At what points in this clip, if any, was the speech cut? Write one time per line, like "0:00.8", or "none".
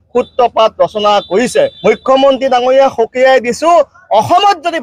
0:01.8